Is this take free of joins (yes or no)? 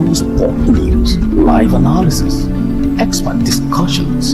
no